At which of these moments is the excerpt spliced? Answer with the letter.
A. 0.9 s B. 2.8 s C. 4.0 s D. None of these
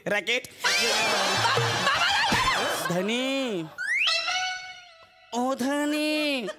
B